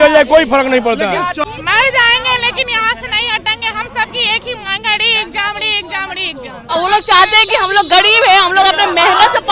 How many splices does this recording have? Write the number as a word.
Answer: two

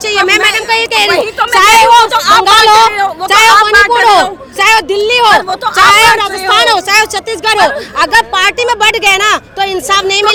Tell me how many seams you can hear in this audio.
zero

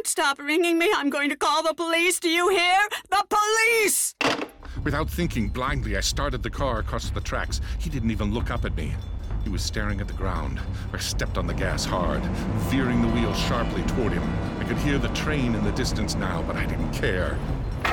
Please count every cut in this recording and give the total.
one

